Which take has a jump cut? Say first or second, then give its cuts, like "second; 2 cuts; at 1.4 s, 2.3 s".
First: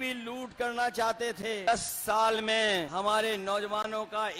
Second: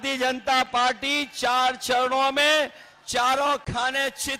first; 2 cuts; at 1.6 s, 2.9 s